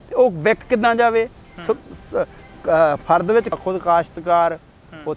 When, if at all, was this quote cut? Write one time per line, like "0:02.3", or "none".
0:03.6

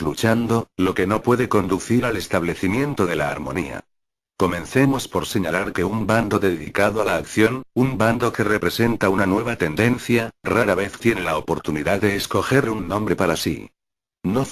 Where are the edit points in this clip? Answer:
0:08.2

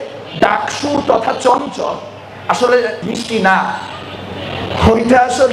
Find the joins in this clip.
0:03.0

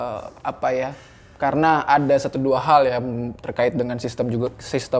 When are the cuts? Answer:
none

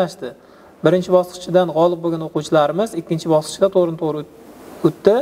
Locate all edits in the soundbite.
none

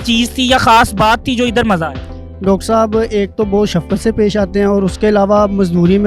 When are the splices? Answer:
none

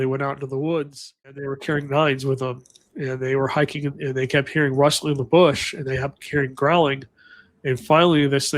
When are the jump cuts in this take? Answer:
0:01.5

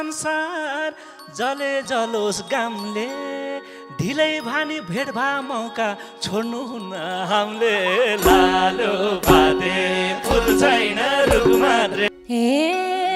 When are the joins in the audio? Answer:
0:12.0

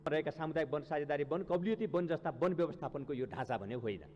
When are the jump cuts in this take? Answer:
none

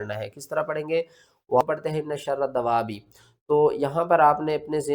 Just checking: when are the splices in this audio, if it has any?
0:01.6

